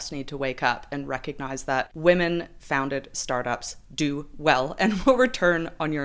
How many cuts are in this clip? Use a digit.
1